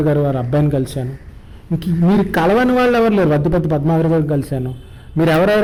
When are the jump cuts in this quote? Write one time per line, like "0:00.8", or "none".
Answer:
none